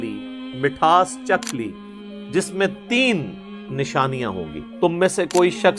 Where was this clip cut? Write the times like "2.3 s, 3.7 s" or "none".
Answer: 4.6 s